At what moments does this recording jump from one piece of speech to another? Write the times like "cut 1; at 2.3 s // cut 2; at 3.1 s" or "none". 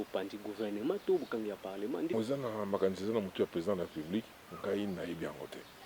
cut 1; at 2.1 s